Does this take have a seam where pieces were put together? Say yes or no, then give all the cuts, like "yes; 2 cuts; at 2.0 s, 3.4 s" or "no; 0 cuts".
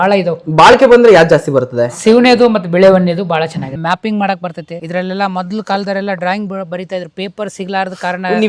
yes; 2 cuts; at 3.7 s, 4.7 s